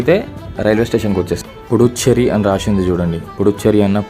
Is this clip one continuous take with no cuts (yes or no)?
no